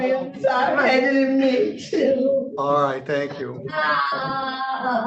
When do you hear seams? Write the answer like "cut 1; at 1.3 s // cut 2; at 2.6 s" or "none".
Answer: none